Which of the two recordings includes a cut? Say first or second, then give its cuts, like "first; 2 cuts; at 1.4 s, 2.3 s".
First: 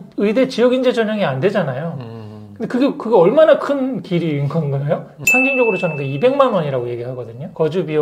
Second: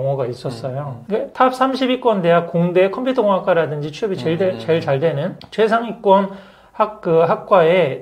first; 1 cut; at 5.2 s